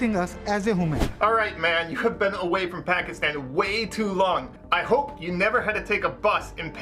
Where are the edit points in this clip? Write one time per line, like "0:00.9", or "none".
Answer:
0:01.0
0:04.6